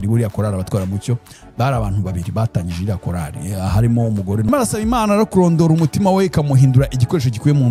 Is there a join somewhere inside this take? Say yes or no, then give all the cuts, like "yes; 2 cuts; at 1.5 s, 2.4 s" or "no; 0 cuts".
yes; 1 cut; at 4.5 s